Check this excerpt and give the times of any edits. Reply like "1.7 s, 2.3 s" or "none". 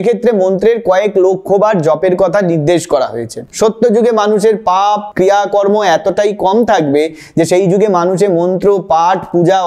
3.5 s